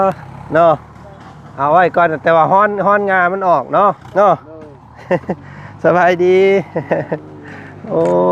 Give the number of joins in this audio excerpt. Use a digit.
1